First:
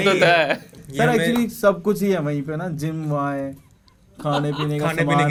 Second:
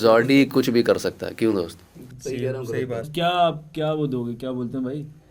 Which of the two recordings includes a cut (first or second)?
second